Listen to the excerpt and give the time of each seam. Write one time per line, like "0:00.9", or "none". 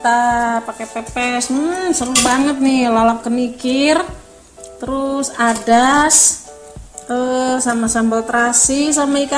none